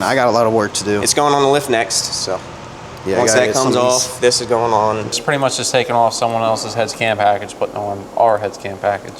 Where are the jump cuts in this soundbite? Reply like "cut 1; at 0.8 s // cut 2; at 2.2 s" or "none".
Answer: cut 1; at 5.2 s